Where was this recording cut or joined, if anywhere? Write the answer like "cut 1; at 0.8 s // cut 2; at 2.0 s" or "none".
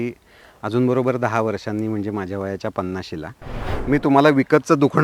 cut 1; at 3.6 s